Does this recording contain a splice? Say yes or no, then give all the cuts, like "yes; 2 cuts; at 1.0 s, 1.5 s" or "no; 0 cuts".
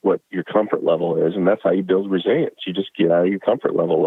no; 0 cuts